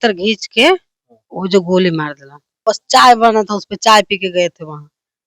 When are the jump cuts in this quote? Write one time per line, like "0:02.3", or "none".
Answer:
0:02.5